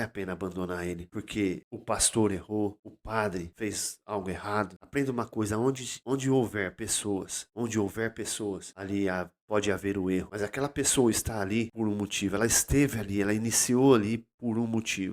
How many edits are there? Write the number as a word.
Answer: nine